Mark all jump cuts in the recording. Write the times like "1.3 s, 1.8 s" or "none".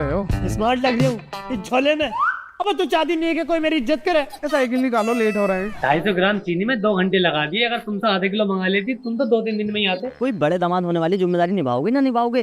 5.7 s, 10.1 s